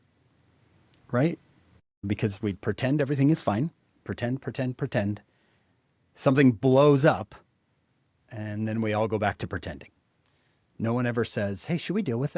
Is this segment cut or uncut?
uncut